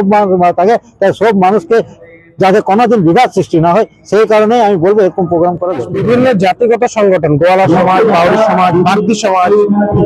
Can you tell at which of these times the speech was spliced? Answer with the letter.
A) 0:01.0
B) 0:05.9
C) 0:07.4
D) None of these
B